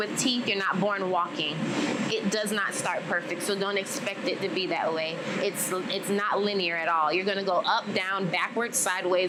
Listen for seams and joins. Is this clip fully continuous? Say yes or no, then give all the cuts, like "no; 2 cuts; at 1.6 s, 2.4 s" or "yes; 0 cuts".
yes; 0 cuts